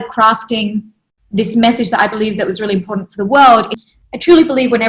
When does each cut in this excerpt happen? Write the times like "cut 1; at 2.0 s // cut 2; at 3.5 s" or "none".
cut 1; at 3.8 s